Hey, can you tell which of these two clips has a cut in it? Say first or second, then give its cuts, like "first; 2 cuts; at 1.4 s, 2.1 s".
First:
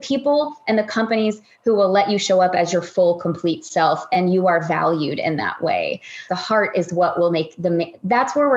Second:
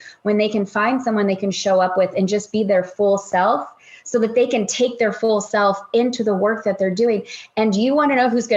first; 1 cut; at 6.3 s